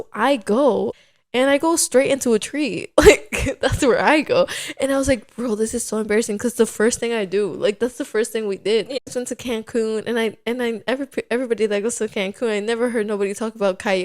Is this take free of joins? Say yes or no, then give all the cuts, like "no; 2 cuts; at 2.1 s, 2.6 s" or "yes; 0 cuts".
no; 2 cuts; at 0.9 s, 9.1 s